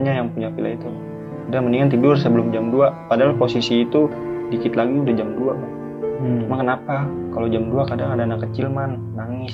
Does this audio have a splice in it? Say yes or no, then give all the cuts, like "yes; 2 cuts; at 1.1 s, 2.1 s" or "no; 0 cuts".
no; 0 cuts